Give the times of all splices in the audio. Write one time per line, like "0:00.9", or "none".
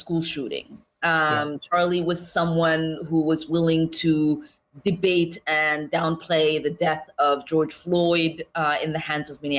0:01.6